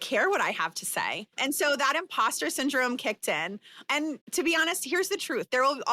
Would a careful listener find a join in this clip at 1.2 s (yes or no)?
yes